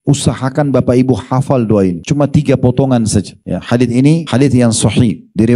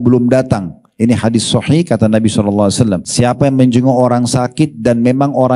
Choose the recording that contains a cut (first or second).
second